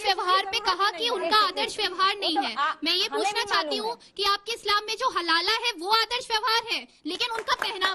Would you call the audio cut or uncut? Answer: uncut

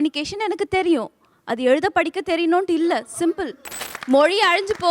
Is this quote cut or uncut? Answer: cut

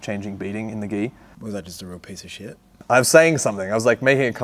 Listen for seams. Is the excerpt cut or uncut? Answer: cut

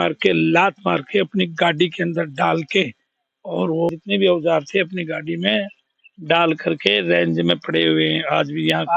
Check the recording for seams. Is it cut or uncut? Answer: cut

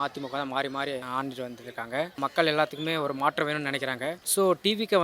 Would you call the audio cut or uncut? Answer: cut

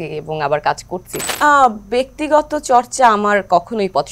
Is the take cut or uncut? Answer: cut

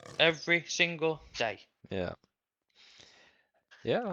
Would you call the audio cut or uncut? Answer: uncut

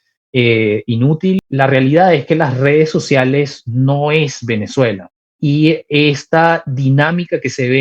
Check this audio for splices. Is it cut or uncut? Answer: cut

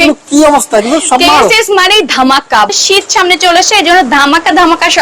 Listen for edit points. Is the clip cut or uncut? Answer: cut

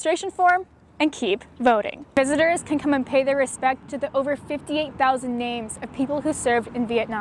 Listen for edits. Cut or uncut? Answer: cut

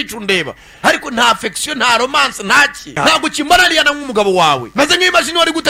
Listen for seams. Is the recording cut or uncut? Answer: uncut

